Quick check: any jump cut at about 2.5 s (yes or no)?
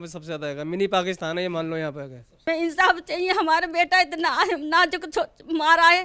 yes